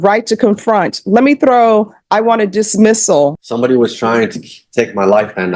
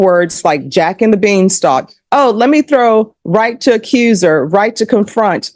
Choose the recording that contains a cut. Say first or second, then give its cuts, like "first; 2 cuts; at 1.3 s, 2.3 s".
first; 1 cut; at 3.4 s